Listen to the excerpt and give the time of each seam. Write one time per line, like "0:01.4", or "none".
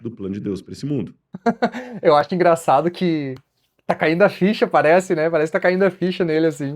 0:01.2